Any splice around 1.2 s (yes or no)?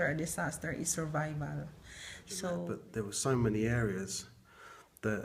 no